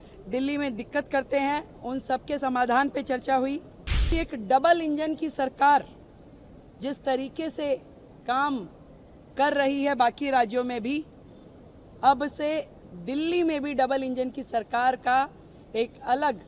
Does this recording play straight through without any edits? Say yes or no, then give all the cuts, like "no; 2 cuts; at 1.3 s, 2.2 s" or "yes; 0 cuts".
no; 1 cut; at 4.1 s